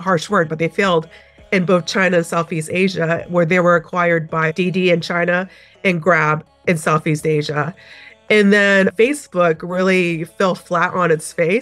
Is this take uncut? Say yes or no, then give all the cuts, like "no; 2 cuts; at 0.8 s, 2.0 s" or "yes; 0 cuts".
yes; 0 cuts